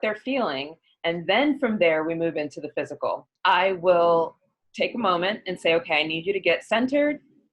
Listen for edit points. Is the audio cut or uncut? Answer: cut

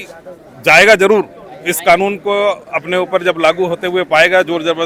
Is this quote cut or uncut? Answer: uncut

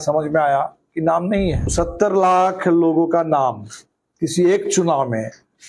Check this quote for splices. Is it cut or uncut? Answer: cut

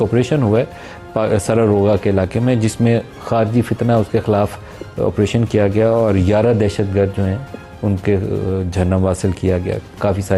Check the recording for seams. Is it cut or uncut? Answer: uncut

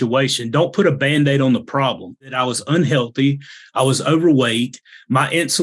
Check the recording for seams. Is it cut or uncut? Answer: cut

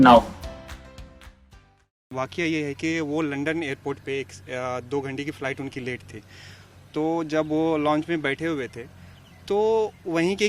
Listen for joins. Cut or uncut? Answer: cut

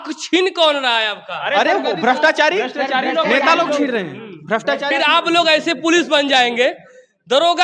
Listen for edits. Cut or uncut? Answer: uncut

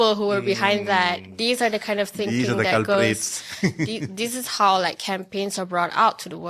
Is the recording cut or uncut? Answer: uncut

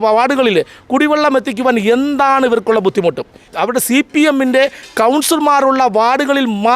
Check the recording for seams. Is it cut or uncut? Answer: cut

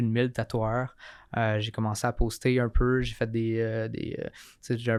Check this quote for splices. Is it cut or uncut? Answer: uncut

